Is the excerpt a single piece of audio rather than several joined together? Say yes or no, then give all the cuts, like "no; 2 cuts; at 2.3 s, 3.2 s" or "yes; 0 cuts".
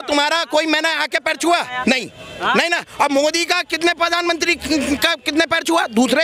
yes; 0 cuts